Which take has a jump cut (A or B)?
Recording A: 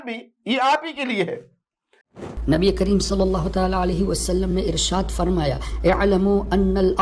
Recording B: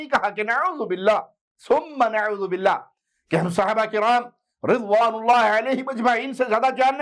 A